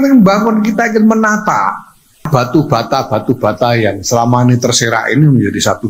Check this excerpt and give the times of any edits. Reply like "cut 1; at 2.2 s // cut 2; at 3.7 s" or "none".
cut 1; at 2.3 s